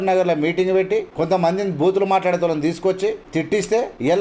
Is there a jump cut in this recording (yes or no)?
yes